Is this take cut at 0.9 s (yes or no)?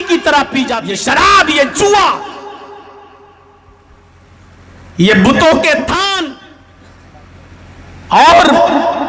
yes